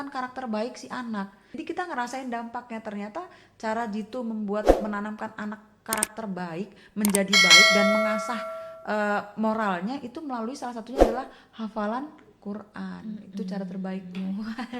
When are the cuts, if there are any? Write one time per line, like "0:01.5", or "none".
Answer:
0:01.4